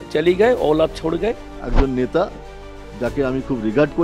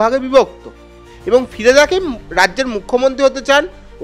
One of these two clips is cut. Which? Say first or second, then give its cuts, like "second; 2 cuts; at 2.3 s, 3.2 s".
first; 1 cut; at 1.6 s